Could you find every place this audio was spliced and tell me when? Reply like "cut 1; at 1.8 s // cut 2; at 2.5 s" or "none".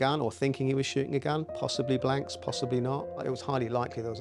cut 1; at 3.2 s